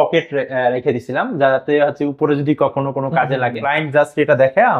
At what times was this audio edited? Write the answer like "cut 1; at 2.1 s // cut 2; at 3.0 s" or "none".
cut 1; at 3.7 s